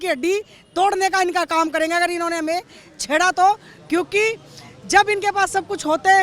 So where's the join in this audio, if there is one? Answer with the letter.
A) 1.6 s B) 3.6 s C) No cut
C